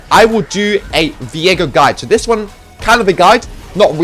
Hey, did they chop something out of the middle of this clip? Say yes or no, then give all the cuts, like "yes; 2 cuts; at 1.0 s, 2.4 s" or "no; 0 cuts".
no; 0 cuts